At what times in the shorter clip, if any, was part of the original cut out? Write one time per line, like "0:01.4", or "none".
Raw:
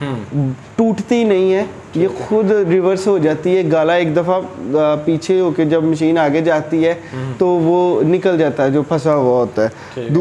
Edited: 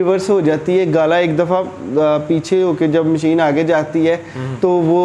none